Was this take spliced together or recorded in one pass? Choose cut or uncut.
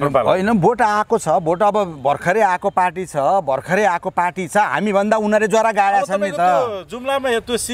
uncut